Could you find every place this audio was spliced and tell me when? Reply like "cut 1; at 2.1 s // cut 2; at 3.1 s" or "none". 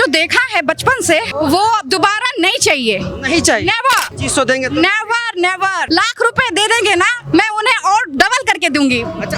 cut 1; at 1.3 s // cut 2; at 4.1 s // cut 3; at 5.8 s